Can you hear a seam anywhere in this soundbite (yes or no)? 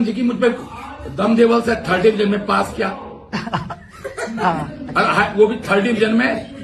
no